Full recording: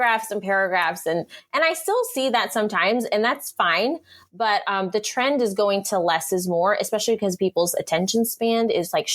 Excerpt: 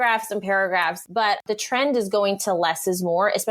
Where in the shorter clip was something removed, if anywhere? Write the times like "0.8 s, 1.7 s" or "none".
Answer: 1.4 s